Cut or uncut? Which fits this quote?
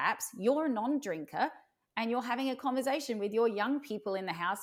uncut